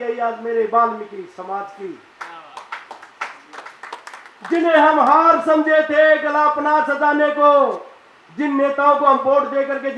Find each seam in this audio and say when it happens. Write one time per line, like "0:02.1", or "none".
none